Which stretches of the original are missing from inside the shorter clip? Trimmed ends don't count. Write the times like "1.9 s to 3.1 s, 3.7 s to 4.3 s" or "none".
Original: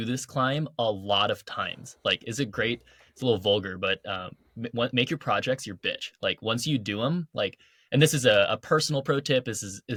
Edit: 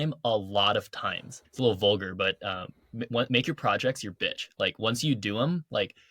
1.8 s to 2.9 s